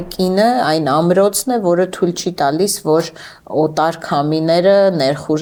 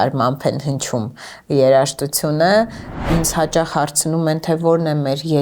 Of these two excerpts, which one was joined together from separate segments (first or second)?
second